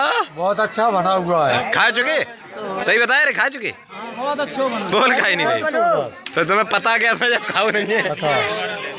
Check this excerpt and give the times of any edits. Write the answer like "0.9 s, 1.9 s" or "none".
none